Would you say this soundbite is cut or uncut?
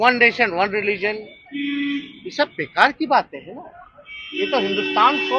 uncut